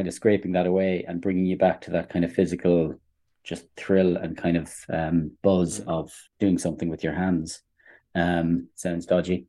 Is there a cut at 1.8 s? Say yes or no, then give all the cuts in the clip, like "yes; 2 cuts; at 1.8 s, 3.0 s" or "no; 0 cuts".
no; 1 cut; at 6.2 s